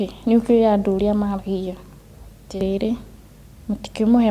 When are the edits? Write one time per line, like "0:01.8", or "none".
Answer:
0:02.6